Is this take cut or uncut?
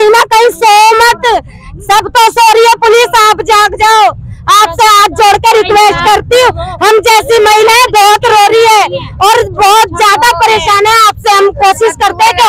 uncut